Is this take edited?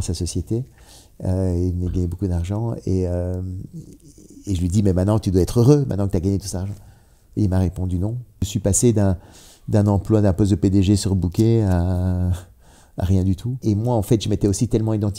yes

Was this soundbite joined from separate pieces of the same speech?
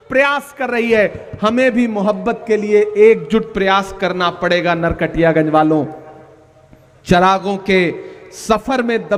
no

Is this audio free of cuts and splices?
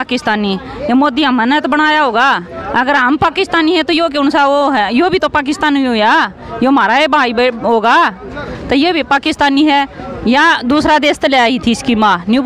yes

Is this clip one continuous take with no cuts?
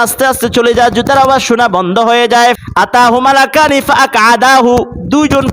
no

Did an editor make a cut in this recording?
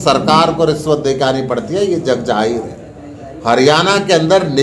no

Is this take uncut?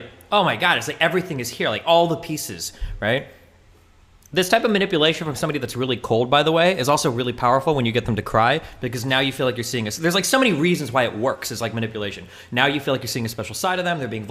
yes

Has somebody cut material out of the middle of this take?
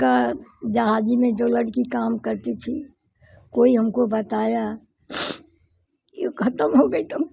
no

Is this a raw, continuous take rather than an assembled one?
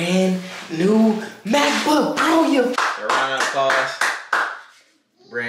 no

